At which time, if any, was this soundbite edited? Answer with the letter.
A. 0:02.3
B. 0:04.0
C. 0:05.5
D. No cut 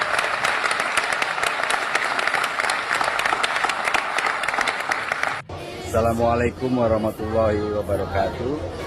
C